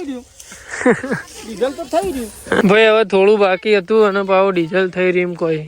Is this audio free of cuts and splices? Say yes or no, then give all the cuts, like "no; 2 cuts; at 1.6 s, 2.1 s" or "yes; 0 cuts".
no; 1 cut; at 2.6 s